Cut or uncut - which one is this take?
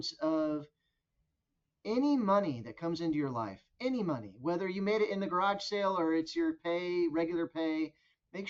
uncut